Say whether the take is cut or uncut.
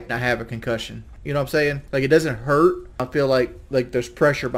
cut